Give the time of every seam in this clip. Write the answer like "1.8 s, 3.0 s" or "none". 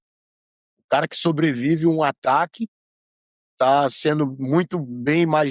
none